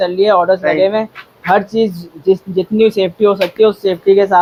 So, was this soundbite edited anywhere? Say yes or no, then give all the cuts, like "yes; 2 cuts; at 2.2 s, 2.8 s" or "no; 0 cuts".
no; 0 cuts